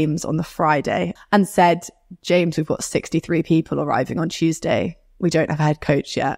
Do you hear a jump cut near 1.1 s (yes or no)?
yes